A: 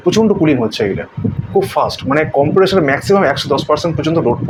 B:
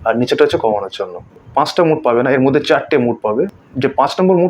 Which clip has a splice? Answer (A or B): B